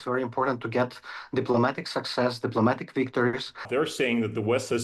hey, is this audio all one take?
no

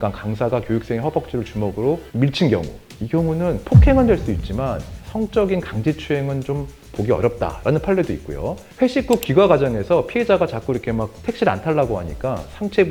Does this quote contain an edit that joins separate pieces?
no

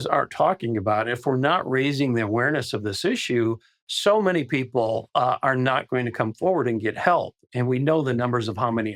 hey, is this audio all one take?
yes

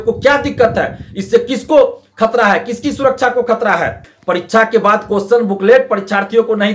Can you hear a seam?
yes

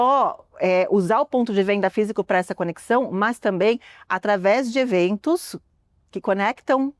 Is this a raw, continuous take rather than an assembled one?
yes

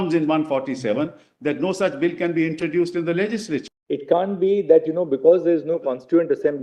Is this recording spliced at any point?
yes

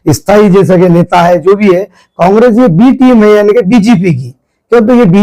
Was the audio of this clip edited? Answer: no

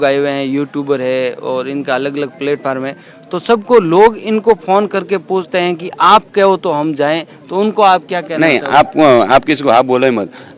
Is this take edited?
no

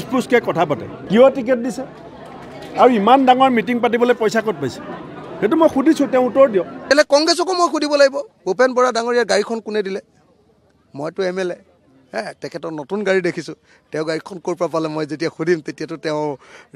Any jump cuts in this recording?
yes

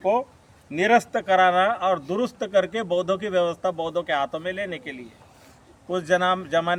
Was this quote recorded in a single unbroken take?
yes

